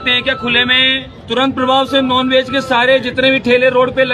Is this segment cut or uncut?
cut